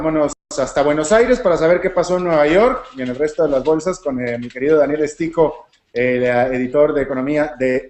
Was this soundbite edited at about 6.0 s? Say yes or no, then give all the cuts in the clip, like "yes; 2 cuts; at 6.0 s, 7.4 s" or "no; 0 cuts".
no; 0 cuts